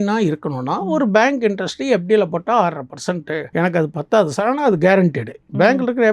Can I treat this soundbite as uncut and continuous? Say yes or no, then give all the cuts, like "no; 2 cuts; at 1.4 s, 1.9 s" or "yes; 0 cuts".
no; 1 cut; at 3.5 s